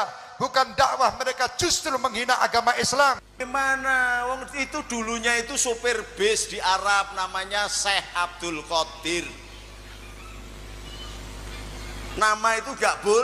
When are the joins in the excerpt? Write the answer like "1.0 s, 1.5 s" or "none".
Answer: 3.3 s